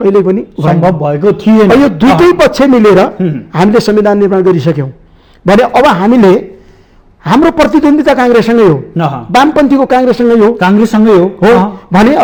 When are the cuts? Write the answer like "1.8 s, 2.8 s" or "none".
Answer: none